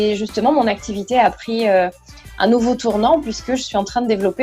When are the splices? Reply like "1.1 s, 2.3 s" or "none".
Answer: none